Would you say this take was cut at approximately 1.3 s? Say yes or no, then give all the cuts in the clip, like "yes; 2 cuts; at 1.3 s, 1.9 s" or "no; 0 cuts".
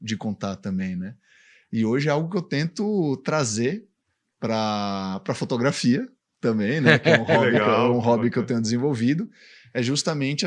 no; 0 cuts